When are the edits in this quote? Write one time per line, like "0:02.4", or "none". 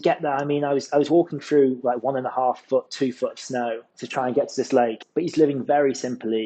0:03.8
0:05.0